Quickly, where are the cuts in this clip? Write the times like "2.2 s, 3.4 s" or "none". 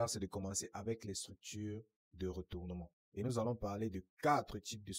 none